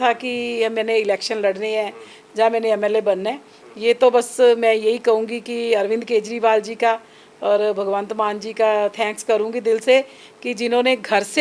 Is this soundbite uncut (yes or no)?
yes